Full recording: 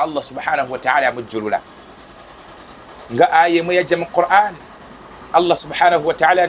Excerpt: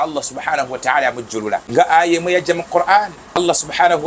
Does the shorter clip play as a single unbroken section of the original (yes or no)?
no